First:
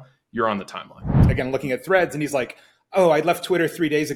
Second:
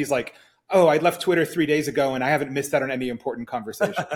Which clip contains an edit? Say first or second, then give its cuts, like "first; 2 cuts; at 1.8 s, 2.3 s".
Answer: first; 1 cut; at 1.2 s